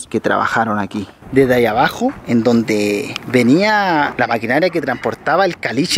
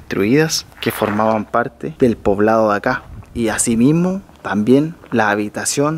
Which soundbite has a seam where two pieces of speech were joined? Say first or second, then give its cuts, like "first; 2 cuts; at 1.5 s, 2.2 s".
first; 1 cut; at 1.2 s